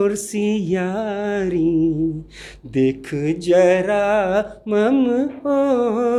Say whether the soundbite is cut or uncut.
uncut